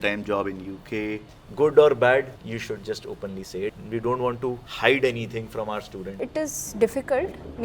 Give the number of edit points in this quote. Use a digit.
5